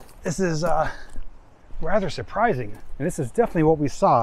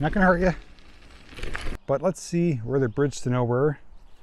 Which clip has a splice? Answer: second; 1 cut; at 1.8 s

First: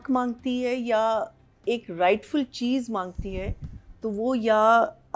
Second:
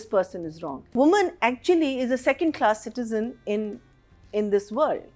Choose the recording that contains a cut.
second; 1 cut; at 0.9 s

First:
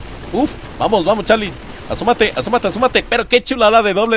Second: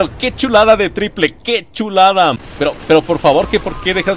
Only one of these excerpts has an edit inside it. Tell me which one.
second; 1 cut; at 2.5 s

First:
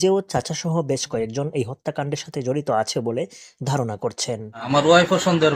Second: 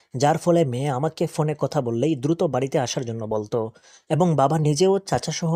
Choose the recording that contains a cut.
first; 1 cut; at 4.7 s

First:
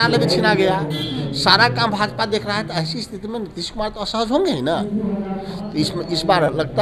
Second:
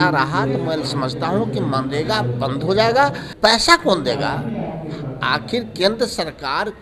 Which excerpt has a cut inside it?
second; 1 cut; at 3.2 s

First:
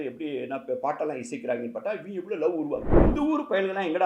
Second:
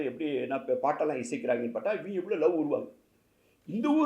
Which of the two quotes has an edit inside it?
first; 1 cut; at 2.9 s

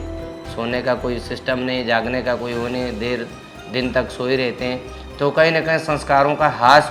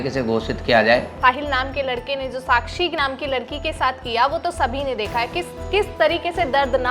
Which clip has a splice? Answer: second; 1 cut; at 1.1 s

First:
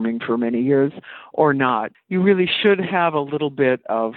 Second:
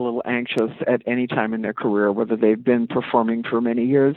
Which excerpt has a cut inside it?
first; 1 cut; at 1.9 s

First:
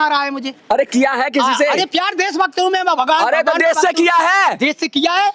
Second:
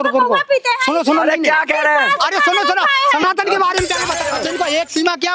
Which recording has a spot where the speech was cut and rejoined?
second; 1 cut; at 4.3 s

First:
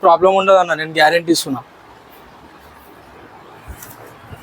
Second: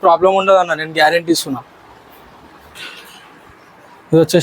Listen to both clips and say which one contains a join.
second; 1 cut; at 2.8 s

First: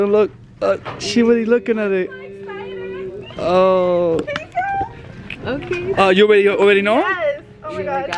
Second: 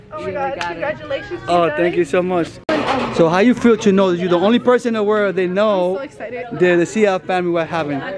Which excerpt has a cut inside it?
second; 1 cut; at 2.6 s

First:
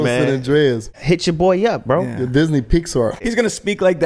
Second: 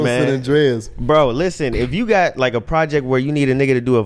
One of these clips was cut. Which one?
first; 2 cuts; at 1.0 s, 3.2 s

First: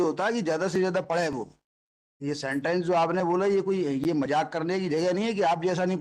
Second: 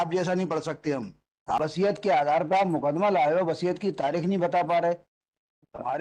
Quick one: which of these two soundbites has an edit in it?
second; 1 cut; at 1.7 s

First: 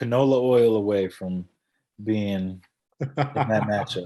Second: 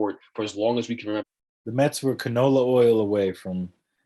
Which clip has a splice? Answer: second; 1 cut; at 1.3 s

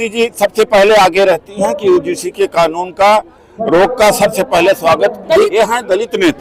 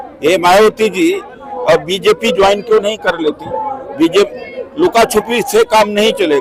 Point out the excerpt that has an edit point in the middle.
first; 1 cut; at 5.5 s

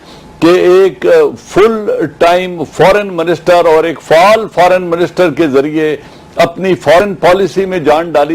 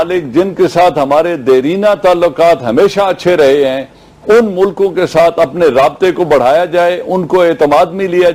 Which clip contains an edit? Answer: first; 1 cut; at 5.5 s

